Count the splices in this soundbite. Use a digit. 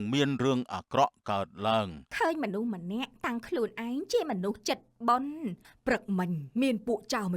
2